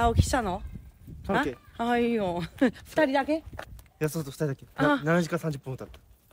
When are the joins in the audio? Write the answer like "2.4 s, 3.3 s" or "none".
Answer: none